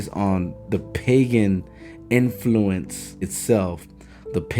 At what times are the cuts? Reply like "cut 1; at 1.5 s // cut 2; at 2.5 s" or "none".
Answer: cut 1; at 3.3 s